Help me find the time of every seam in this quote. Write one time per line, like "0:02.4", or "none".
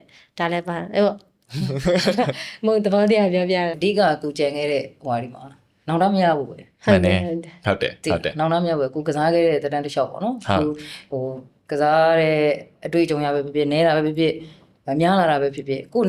0:03.7